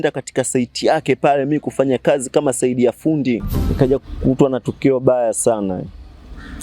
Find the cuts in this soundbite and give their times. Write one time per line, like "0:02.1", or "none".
0:03.6

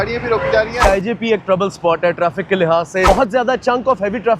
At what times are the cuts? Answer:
0:00.8
0:03.1

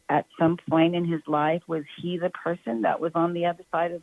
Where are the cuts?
none

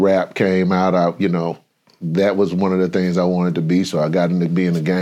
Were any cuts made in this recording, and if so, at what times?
none

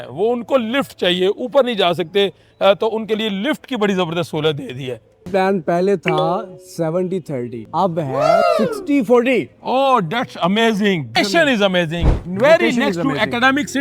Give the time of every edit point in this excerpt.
0:05.3
0:11.2

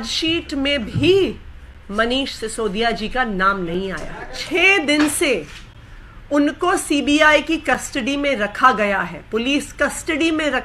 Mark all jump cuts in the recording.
0:04.4

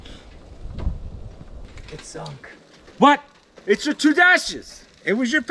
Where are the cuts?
0:01.6

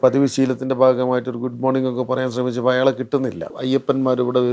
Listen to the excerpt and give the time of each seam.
0:03.4

